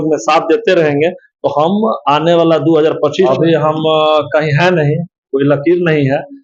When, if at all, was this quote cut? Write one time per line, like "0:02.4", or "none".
0:03.3